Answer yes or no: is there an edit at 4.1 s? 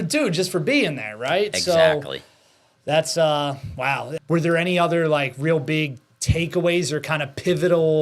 yes